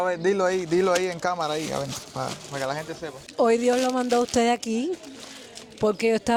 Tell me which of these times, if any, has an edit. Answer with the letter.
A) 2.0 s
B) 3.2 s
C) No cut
C